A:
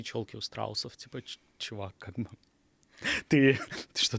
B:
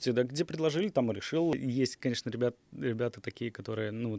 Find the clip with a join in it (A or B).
B